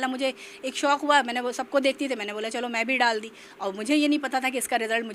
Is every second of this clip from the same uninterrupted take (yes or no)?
yes